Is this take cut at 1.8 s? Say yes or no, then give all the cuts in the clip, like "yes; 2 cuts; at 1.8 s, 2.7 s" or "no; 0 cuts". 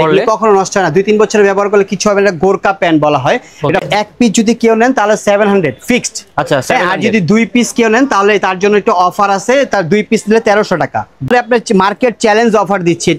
no; 2 cuts; at 3.8 s, 11.3 s